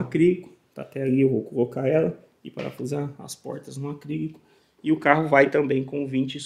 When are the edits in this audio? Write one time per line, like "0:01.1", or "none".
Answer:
none